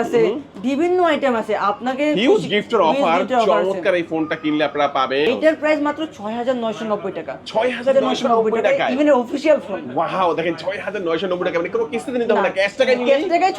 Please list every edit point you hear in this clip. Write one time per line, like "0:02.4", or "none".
0:05.3